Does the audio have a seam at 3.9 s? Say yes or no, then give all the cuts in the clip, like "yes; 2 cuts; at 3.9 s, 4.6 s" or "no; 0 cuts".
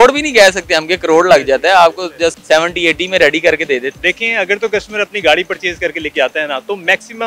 yes; 2 cuts; at 2.4 s, 3.9 s